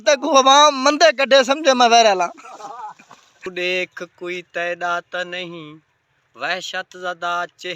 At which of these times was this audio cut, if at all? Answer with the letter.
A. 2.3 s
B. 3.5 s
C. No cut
B